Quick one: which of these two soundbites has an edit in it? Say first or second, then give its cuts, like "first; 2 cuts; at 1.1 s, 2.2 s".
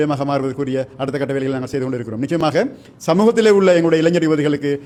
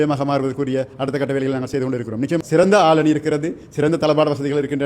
second; 1 cut; at 2.4 s